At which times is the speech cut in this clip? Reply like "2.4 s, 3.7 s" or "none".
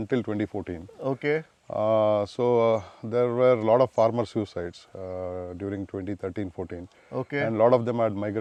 none